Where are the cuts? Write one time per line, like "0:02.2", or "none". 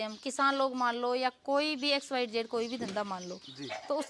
none